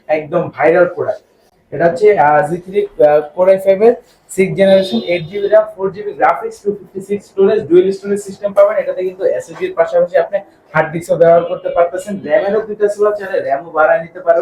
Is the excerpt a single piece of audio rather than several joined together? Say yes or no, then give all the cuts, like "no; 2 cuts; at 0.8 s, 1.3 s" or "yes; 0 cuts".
yes; 0 cuts